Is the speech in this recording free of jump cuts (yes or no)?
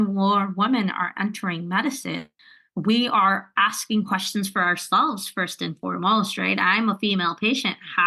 yes